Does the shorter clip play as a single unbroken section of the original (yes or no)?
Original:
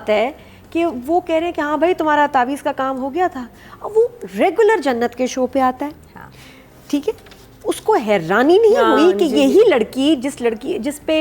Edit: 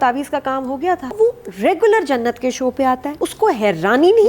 no